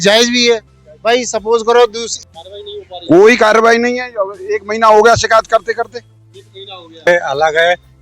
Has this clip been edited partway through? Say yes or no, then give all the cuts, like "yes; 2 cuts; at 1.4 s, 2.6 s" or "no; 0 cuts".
yes; 2 cuts; at 2.1 s, 7.1 s